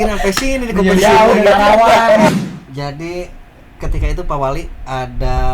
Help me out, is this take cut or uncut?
cut